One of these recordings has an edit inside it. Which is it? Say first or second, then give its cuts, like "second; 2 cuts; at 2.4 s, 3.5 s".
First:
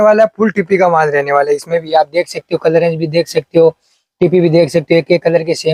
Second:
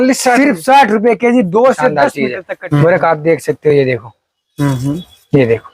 second; 1 cut; at 2.1 s